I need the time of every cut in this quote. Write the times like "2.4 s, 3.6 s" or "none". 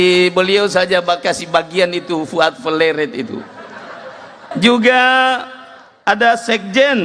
4.5 s